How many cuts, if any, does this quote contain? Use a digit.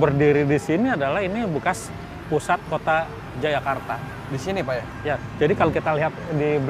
0